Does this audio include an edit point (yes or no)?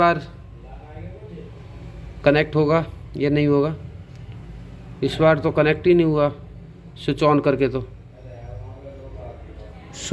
no